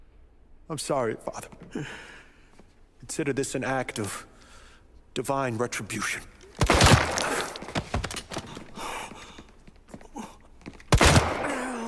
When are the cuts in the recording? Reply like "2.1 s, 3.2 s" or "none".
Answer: none